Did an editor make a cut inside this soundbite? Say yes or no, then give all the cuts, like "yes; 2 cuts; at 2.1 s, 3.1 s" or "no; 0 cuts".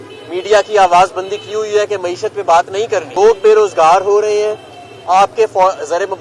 yes; 1 cut; at 3.1 s